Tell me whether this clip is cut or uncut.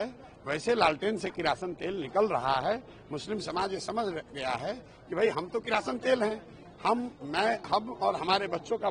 uncut